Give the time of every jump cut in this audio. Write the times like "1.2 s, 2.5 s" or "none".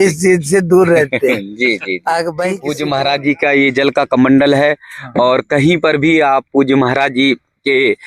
2.6 s